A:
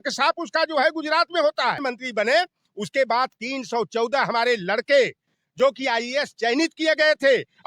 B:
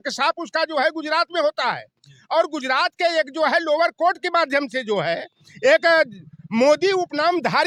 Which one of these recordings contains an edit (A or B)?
A